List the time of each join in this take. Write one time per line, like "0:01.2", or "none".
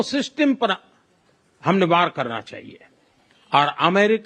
none